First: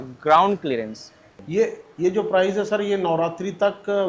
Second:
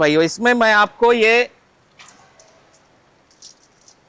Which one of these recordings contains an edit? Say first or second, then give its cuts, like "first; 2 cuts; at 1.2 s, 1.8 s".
first; 1 cut; at 1.3 s